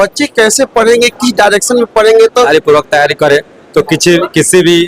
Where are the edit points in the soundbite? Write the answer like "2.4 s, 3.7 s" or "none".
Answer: 2.5 s